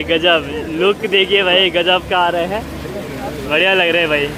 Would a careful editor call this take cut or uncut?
uncut